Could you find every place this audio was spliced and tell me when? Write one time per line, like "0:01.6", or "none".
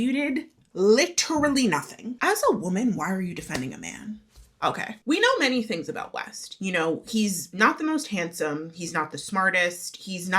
0:02.2
0:05.0